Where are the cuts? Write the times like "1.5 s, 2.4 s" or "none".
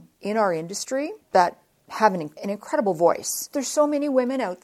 1.2 s, 2.3 s, 3.5 s